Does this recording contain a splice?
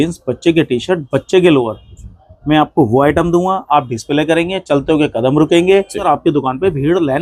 yes; 1 cut; at 6.0 s

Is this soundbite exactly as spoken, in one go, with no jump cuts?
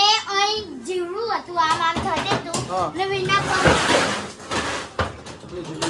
yes; 0 cuts

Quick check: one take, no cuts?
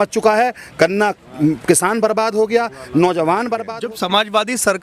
no; 1 cut; at 3.7 s

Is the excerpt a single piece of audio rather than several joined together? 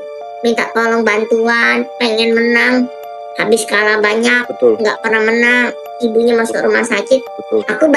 yes; 0 cuts

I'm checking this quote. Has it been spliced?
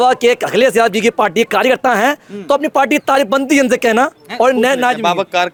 no; 0 cuts

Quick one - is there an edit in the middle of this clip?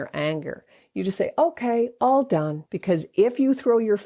yes; 1 cut; at 2.6 s

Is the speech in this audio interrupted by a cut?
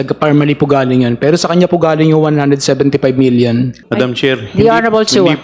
yes; 1 cut; at 3.8 s

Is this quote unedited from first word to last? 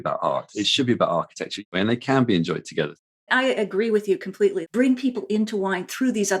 no; 3 cuts; at 1.6 s, 3.1 s, 4.6 s

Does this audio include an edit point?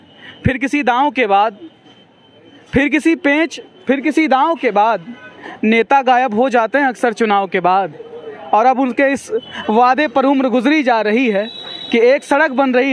no; 0 cuts

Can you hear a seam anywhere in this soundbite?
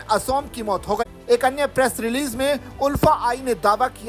no; 0 cuts

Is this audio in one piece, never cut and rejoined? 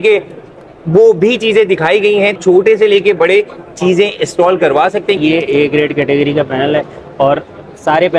no; 2 cuts; at 2.3 s, 5.2 s

